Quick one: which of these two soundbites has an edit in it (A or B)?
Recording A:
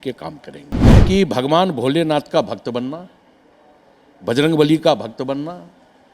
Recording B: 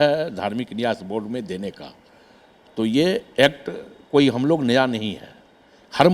A